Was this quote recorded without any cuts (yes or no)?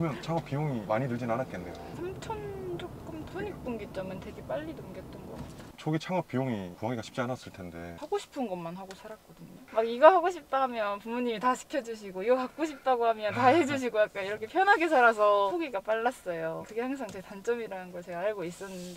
no